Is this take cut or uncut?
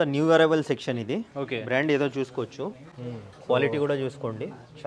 uncut